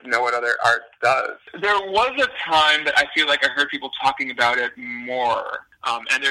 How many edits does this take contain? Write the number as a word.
one